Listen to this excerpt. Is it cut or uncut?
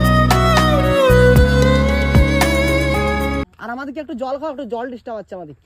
cut